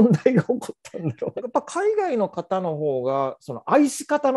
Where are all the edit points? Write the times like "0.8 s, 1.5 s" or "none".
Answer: 1.3 s